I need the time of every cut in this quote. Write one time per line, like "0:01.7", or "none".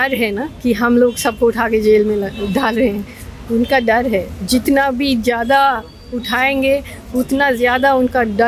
none